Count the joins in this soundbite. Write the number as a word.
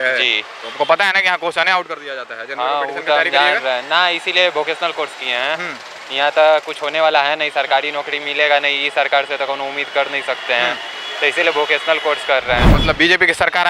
zero